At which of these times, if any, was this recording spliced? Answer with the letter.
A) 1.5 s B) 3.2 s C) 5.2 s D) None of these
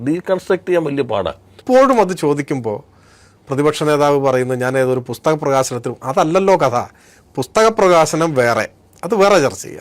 A